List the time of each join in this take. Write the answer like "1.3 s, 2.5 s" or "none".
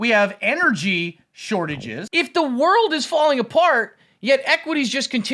1.9 s

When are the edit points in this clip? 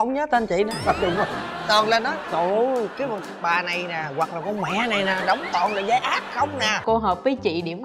6.8 s

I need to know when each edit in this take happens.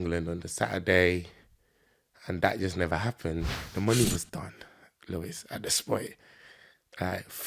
3.7 s

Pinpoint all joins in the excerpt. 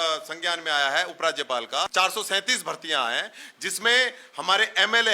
1.9 s

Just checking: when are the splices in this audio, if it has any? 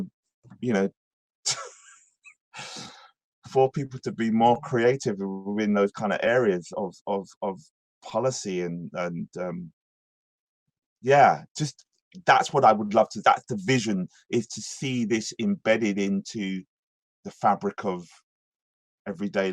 none

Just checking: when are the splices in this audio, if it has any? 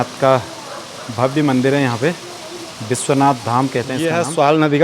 3.9 s

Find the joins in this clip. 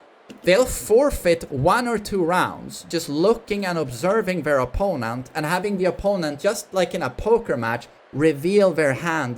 2.8 s

